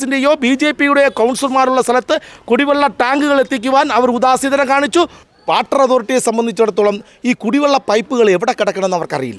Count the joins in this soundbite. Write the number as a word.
one